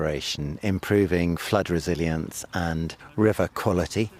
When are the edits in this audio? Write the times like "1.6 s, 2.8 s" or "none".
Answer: 3.0 s